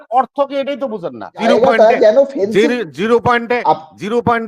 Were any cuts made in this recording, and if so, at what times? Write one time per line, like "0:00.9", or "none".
0:01.4